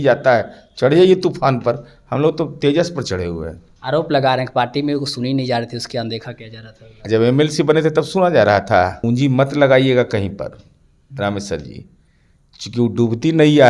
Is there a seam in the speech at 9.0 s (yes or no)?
yes